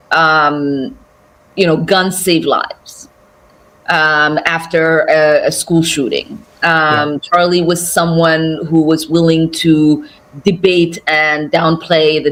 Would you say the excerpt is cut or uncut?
uncut